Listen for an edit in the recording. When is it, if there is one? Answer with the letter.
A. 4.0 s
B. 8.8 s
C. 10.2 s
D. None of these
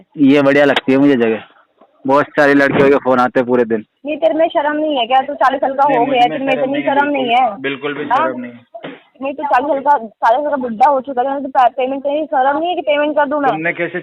A